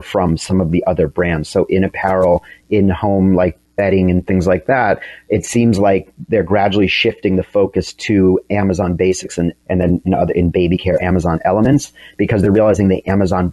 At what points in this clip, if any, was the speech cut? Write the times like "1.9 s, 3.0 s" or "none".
none